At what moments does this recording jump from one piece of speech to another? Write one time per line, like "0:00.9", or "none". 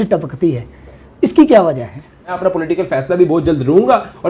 0:02.4